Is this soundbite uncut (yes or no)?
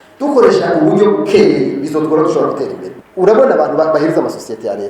no